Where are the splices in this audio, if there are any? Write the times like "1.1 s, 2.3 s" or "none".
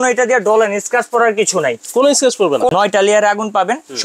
2.7 s

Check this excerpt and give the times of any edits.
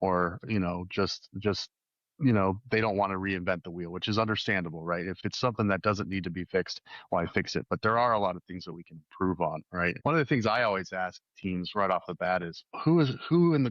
5.2 s, 10.0 s, 12.6 s

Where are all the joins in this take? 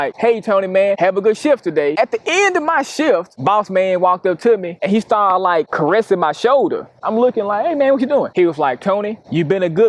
2.0 s

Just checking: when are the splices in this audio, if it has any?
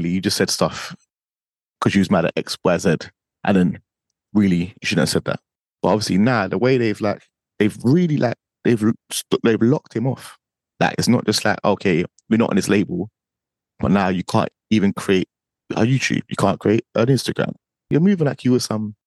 5.5 s, 17.8 s

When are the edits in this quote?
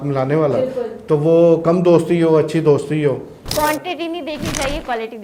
none

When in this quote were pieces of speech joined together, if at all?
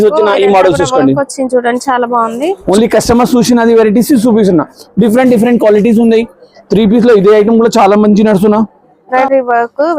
2.6 s, 9.1 s

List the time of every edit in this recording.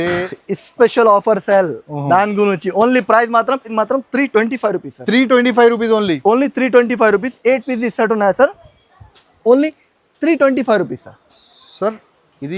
3.7 s

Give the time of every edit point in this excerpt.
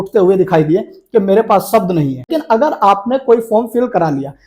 2.4 s

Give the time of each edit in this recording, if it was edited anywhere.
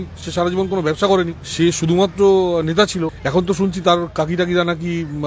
1.4 s, 3.2 s

